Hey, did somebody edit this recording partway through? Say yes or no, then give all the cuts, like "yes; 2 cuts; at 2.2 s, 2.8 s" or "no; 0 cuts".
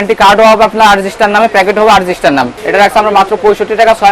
yes; 1 cut; at 2.6 s